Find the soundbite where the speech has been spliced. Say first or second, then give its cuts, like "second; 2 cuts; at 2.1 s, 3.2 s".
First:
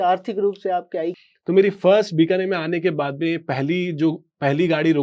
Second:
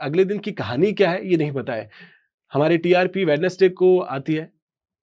first; 1 cut; at 1.1 s